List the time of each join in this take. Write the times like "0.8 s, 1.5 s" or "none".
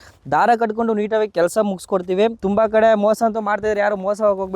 2.4 s